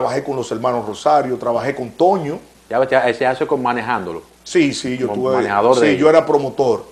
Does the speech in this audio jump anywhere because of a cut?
no; 0 cuts

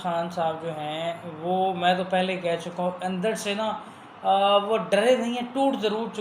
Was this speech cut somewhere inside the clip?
no; 0 cuts

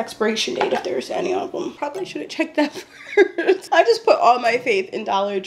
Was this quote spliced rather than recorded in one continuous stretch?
yes; 2 cuts; at 1.8 s, 3.6 s

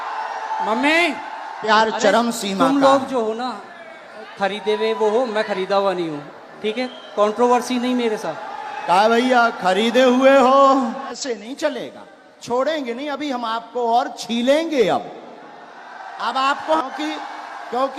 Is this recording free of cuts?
no; 3 cuts; at 1.6 s, 11.2 s, 16.8 s

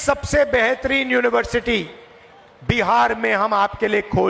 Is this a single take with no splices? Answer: yes; 0 cuts

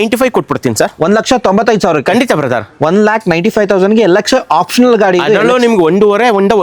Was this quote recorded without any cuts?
yes; 0 cuts

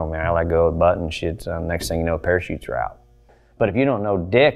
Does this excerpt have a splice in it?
yes; 1 cut; at 3.4 s

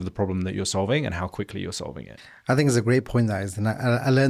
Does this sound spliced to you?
no; 0 cuts

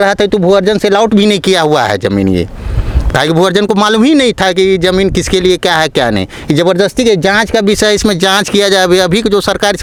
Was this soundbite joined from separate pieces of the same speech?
no; 0 cuts

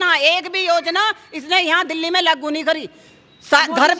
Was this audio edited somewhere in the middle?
no; 0 cuts

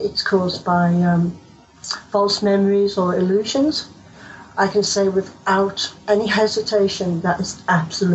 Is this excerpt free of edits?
yes; 0 cuts

